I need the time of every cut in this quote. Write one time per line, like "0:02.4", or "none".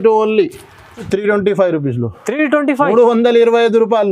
0:01.1